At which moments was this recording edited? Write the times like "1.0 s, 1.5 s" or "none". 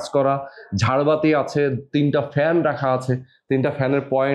none

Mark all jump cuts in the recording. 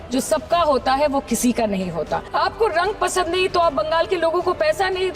2.3 s

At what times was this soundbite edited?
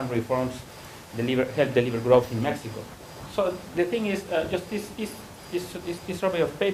4.7 s

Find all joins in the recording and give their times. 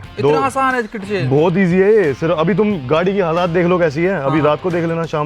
none

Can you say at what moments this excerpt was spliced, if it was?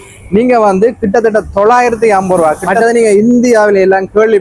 2.7 s

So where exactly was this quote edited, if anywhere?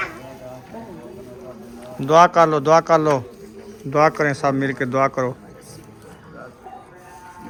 none

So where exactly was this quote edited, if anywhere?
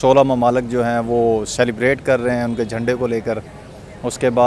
none

